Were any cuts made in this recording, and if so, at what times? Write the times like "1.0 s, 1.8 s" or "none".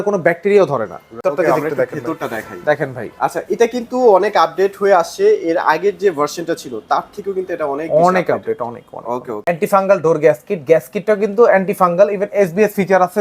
1.1 s, 9.3 s